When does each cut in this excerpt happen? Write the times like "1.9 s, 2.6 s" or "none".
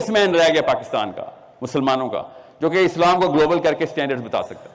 none